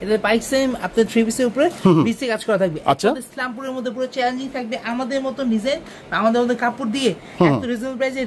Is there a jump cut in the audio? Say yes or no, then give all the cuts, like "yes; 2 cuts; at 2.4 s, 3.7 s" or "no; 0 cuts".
no; 0 cuts